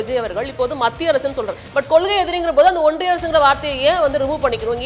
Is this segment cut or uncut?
cut